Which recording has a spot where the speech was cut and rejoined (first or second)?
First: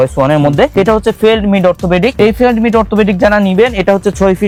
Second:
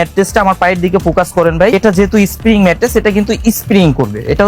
second